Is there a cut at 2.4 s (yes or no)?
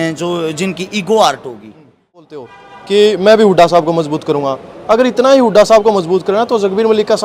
yes